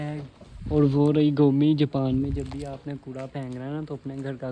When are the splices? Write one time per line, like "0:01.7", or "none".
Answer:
none